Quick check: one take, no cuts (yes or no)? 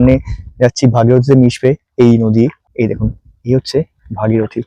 no